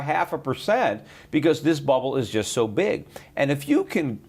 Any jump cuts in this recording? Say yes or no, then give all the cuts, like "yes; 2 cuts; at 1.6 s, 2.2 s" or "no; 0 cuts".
yes; 1 cut; at 1.1 s